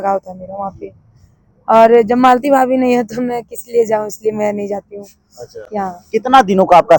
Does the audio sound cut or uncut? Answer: uncut